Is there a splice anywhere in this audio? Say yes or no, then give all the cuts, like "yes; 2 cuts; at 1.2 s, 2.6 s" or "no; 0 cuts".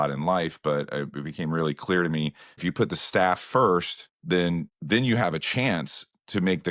yes; 1 cut; at 2.6 s